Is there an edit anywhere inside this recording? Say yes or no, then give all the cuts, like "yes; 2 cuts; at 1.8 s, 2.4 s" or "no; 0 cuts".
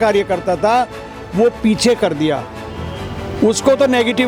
no; 0 cuts